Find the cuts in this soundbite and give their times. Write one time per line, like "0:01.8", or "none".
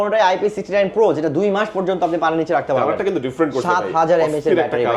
none